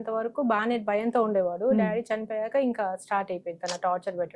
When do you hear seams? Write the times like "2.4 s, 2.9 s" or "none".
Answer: none